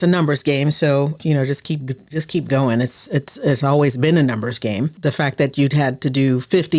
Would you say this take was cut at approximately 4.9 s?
yes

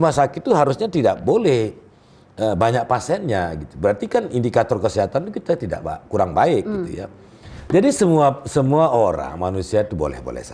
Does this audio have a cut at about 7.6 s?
yes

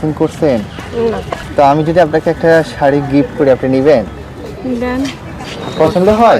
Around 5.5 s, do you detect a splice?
yes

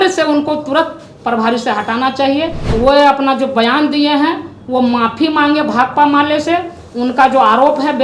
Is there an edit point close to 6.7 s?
no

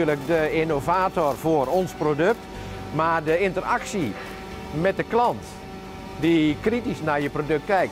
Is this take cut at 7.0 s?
yes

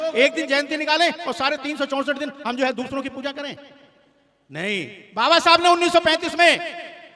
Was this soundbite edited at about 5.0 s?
yes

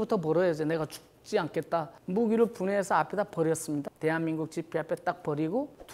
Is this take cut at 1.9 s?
yes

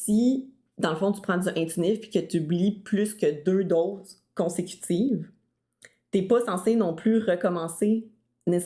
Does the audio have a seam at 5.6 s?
no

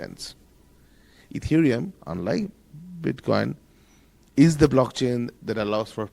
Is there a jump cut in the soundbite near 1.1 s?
yes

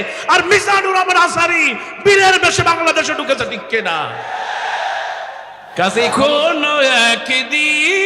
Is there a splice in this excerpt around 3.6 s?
no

